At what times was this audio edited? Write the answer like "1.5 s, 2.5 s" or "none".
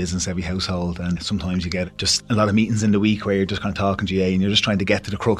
1.2 s